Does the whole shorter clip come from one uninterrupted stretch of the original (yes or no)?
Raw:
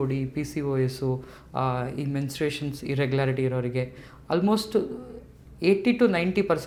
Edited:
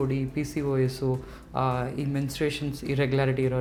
yes